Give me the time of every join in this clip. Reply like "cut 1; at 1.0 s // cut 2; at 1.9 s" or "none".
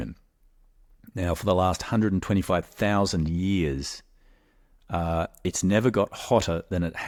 none